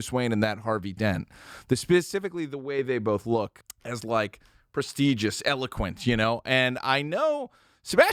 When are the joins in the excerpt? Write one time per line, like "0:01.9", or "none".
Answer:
0:03.6